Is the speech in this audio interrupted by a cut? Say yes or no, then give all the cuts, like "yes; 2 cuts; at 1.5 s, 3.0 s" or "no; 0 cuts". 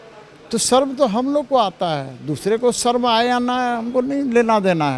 no; 0 cuts